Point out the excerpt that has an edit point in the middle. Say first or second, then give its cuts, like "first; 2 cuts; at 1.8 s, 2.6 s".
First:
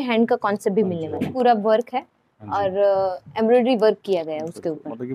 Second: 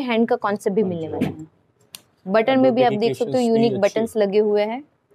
first; 1 cut; at 1.3 s